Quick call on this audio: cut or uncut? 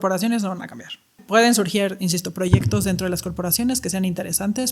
cut